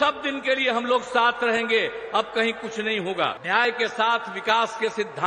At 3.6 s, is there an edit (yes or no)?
yes